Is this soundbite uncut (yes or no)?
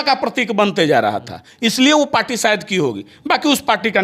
yes